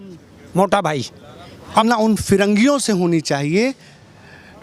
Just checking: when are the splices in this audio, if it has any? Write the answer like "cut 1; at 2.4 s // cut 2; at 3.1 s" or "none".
cut 1; at 1.8 s